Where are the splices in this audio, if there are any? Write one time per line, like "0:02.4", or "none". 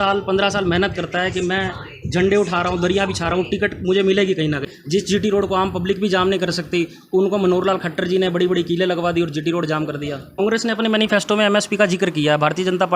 0:04.7
0:10.4